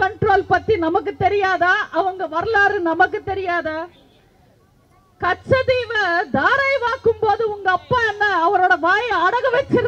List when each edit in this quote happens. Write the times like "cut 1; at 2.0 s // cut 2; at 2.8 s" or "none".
none